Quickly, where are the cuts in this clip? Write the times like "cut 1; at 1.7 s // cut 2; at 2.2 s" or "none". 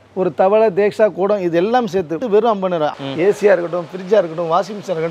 cut 1; at 2.2 s // cut 2; at 3.0 s